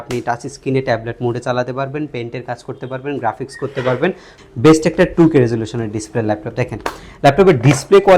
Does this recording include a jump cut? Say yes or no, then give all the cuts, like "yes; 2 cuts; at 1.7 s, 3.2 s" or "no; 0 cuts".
yes; 1 cut; at 4.3 s